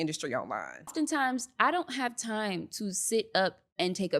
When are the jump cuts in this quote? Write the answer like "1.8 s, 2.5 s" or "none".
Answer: 0.9 s